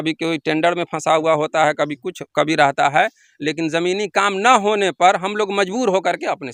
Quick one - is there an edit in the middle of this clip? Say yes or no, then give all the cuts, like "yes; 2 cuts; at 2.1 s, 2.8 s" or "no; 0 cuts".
no; 0 cuts